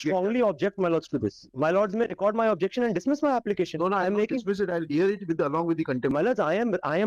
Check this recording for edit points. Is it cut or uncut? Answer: uncut